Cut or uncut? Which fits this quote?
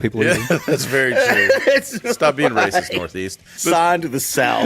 cut